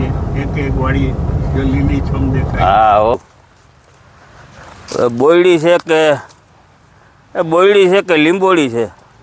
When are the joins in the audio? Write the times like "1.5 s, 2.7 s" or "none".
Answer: 3.1 s